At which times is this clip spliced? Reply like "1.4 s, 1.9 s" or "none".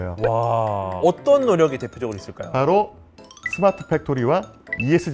1.0 s